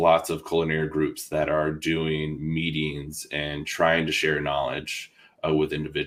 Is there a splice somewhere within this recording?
no; 0 cuts

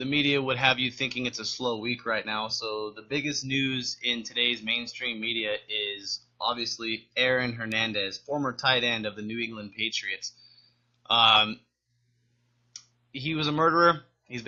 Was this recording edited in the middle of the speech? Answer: no; 0 cuts

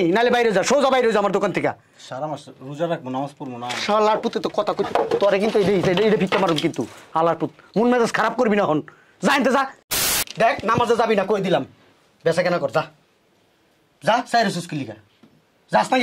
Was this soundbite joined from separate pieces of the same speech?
yes; 1 cut; at 10.2 s

